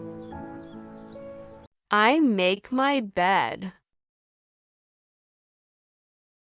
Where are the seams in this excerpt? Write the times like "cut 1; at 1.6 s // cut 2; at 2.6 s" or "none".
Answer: cut 1; at 1.3 s